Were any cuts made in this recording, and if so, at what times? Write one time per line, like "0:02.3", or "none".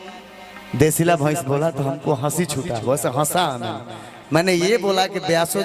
none